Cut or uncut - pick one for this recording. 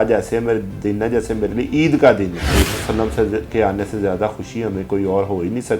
cut